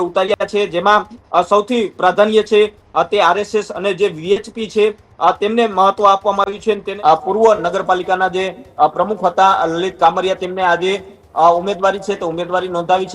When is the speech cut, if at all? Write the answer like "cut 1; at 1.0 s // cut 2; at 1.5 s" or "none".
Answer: cut 1; at 6.9 s